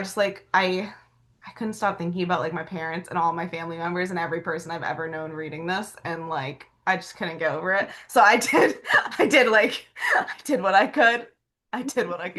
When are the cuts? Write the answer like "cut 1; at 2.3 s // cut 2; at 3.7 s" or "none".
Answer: none